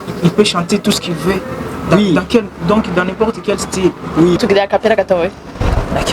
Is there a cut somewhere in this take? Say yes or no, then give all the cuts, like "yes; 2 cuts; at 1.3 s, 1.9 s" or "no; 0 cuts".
yes; 1 cut; at 4.4 s